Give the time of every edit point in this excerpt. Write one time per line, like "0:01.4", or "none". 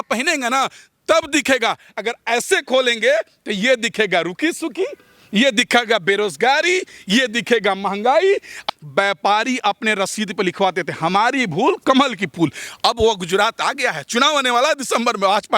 0:08.6

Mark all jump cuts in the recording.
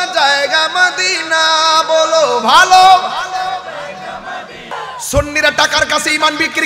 0:04.7

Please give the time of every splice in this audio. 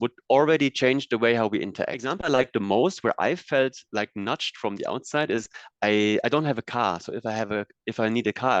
0:02.1

